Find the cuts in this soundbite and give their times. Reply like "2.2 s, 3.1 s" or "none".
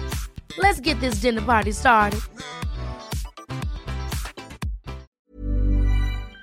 5.2 s